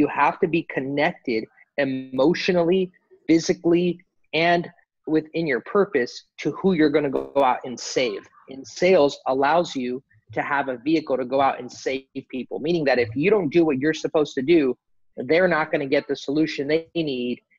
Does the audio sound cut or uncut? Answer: uncut